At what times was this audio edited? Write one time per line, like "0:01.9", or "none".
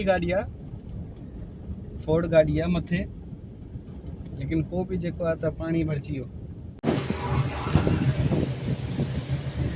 0:06.6